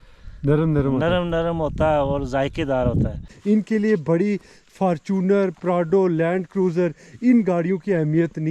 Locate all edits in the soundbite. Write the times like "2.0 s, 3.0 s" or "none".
3.2 s